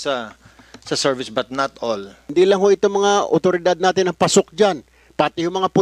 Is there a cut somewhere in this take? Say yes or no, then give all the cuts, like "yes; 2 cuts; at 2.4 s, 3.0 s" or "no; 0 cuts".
yes; 1 cut; at 2.2 s